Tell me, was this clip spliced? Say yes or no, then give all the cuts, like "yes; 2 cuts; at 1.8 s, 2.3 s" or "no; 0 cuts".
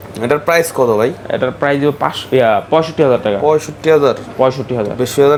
no; 0 cuts